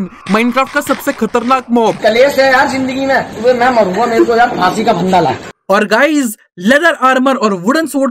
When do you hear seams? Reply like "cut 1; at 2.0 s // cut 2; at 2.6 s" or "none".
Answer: cut 1; at 5.5 s